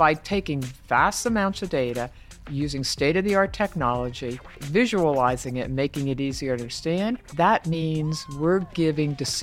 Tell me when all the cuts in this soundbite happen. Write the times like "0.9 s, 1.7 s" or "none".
none